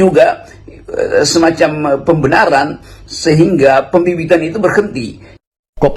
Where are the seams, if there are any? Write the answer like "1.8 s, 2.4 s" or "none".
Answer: none